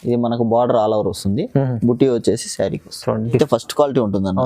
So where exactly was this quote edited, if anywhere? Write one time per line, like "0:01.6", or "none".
0:03.4